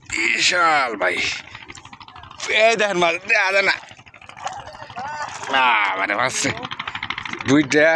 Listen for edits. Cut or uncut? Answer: uncut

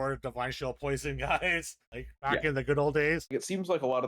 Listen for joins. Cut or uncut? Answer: cut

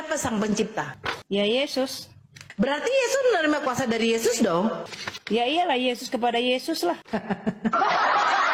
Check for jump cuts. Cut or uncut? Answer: uncut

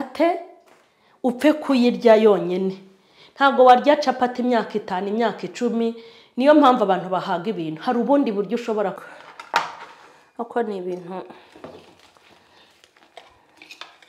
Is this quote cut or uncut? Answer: cut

